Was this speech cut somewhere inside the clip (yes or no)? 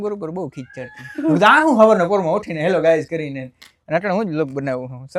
no